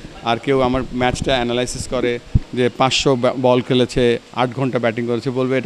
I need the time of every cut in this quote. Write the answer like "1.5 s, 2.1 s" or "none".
none